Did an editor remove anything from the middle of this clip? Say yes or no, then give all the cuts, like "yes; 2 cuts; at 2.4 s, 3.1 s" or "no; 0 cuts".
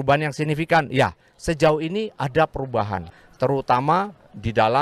yes; 1 cut; at 3.1 s